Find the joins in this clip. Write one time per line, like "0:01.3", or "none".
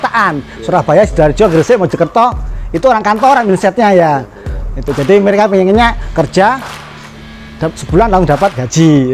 none